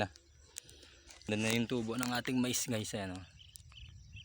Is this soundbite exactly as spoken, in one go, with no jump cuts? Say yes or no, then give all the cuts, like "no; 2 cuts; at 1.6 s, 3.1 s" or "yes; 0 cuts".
no; 1 cut; at 1.3 s